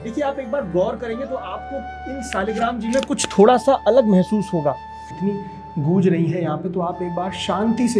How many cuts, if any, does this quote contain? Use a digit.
1